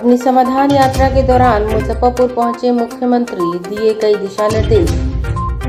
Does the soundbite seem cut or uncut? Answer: uncut